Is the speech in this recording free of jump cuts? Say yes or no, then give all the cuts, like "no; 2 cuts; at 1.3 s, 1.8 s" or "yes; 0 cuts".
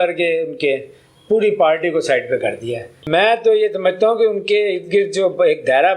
no; 1 cut; at 2.9 s